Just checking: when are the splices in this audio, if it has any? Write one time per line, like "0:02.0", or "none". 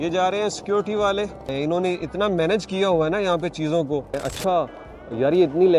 0:01.5
0:04.2